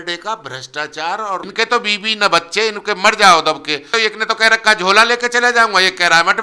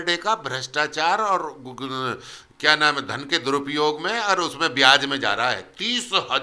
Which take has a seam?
first; 2 cuts; at 1.5 s, 3.9 s

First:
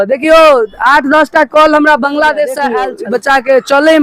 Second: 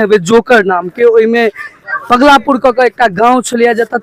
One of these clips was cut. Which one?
first; 1 cut; at 2.7 s

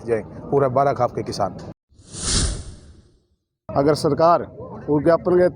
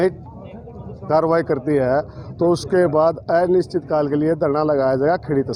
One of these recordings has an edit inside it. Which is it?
first; 2 cuts; at 1.7 s, 3.5 s

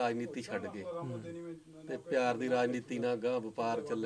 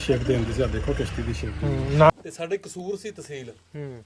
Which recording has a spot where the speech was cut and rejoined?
second; 1 cut; at 2.1 s

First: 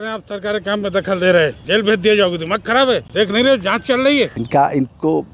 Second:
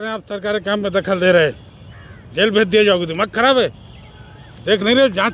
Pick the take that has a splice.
first; 3 cuts; at 1.6 s, 3.1 s, 4.4 s

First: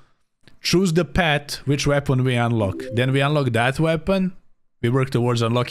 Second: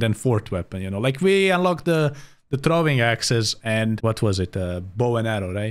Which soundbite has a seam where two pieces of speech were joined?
second; 1 cut; at 4.0 s

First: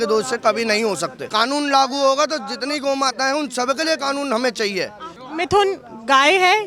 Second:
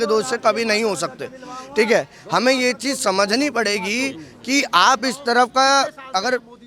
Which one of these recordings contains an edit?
first; 2 cuts; at 1.2 s, 5.2 s

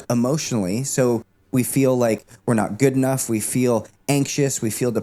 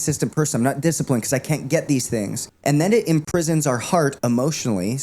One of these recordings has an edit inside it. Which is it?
second; 1 cut; at 2.4 s

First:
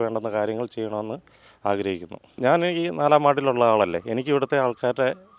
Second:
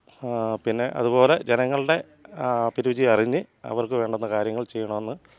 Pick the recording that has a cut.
first; 1 cut; at 2.3 s

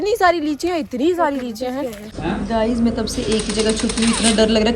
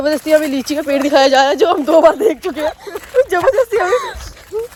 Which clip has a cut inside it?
first; 1 cut; at 2.1 s

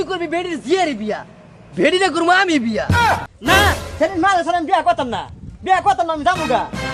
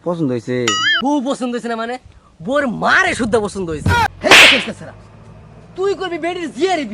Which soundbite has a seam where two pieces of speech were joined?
second; 2 cuts; at 0.9 s, 4.1 s

